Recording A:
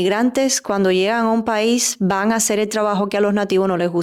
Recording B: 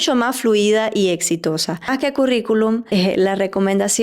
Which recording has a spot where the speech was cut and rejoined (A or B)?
B